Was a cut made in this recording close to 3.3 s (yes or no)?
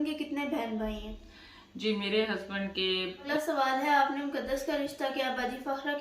yes